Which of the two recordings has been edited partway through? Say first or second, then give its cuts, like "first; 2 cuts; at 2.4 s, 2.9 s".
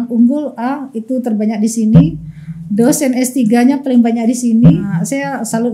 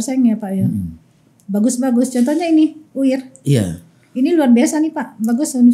first; 1 cut; at 4.8 s